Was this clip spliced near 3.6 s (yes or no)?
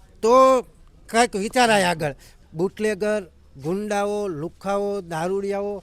no